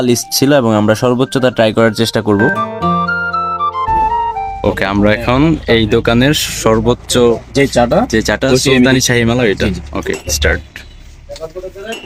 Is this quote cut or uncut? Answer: uncut